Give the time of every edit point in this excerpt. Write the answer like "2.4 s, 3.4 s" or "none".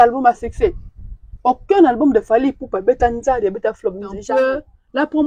4.2 s